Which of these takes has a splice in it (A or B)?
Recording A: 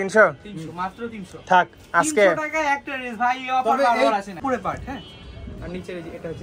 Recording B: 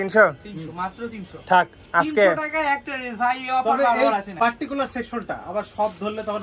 A